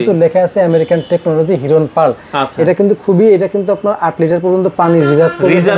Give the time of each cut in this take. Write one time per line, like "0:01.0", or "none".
none

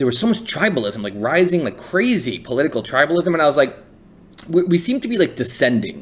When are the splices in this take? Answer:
none

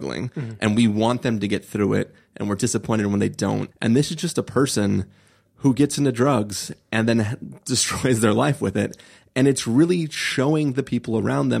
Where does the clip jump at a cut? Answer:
0:03.7

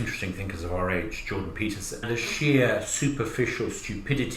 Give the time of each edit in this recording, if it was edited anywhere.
0:02.0

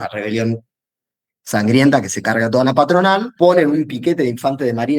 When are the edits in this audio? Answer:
0:03.3

